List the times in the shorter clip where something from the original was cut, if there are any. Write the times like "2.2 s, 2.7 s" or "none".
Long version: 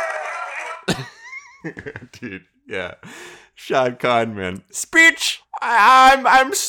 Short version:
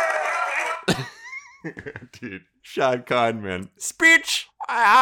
2.5 s